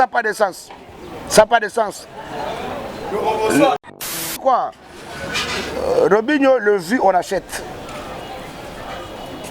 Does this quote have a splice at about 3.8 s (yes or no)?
yes